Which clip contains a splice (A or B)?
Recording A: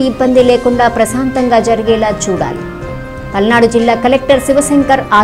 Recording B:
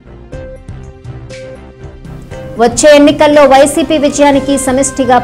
B